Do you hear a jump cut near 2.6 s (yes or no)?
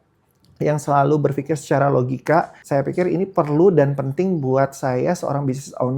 yes